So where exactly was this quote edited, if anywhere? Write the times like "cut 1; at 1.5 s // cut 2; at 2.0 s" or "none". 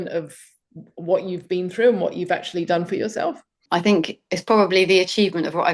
cut 1; at 3.6 s